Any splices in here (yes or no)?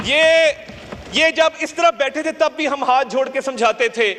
no